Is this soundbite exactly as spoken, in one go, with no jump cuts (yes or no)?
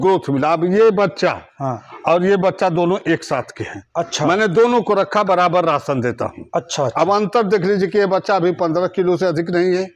yes